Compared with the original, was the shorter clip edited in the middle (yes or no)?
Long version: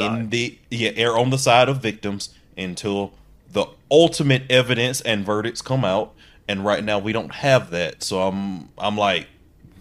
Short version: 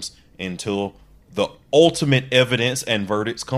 no